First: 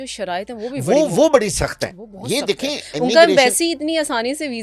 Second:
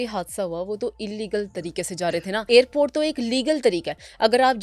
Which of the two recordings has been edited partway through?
second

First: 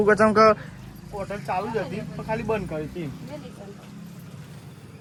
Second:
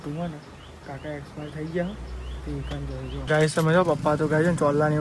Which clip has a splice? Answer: second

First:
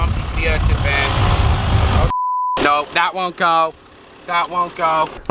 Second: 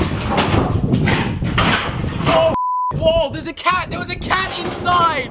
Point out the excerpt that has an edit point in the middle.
first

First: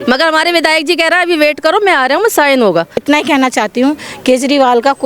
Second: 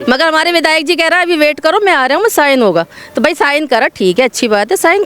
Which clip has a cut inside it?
first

